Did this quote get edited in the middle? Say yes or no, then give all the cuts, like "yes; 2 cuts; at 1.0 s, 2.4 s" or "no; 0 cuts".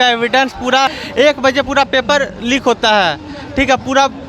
yes; 1 cut; at 1.0 s